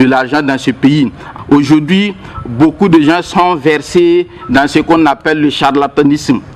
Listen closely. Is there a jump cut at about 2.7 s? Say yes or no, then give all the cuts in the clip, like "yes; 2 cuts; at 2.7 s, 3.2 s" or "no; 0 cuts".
no; 1 cut; at 1.2 s